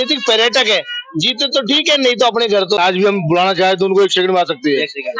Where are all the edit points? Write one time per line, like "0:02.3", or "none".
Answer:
0:02.8